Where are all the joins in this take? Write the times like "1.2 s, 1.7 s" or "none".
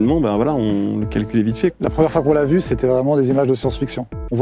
1.7 s